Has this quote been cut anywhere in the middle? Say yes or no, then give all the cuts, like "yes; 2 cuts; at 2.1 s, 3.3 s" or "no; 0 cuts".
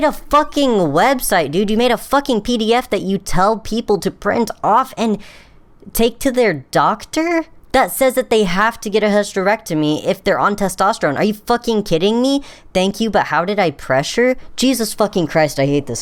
no; 0 cuts